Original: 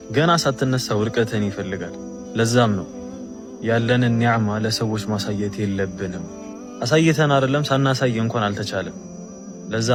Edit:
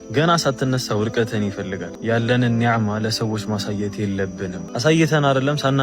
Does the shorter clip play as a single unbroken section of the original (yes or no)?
no